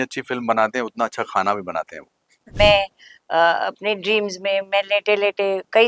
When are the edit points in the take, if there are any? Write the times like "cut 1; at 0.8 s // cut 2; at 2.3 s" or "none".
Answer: cut 1; at 2.5 s